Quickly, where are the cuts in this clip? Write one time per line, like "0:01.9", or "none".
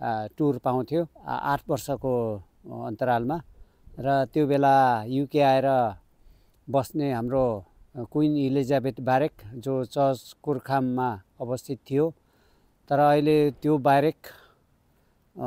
none